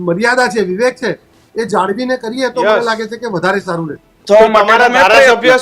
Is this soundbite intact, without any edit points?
no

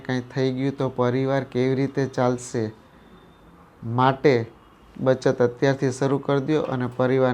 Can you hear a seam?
no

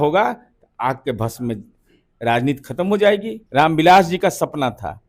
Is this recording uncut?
no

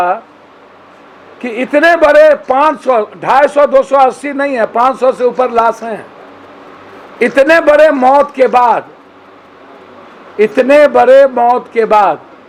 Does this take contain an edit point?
no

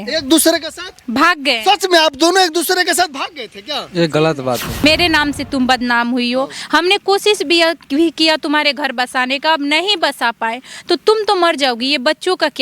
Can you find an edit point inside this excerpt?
yes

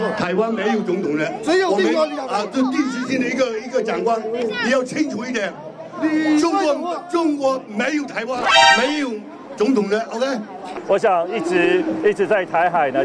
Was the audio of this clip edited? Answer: yes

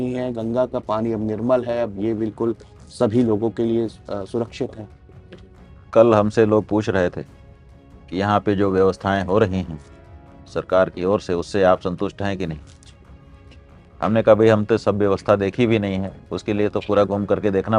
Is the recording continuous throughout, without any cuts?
yes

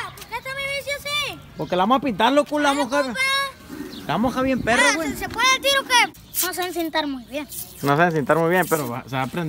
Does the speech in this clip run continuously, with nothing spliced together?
no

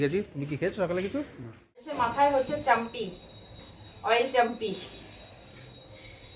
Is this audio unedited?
no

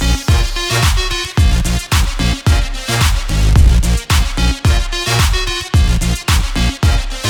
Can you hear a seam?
no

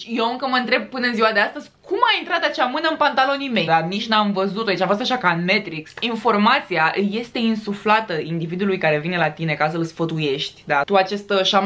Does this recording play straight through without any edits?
no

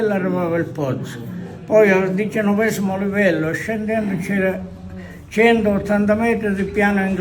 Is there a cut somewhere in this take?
no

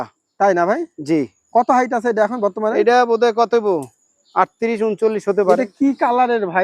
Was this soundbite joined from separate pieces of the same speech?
yes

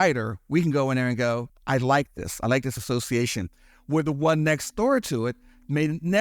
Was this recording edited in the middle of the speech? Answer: yes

